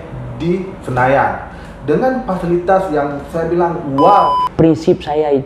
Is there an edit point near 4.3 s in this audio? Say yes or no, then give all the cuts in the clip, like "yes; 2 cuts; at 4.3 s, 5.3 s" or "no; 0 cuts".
yes; 1 cut; at 4.3 s